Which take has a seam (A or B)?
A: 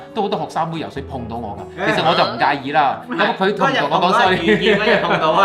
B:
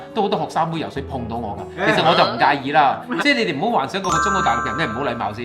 B